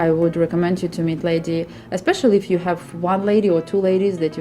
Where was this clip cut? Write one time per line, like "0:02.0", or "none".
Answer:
none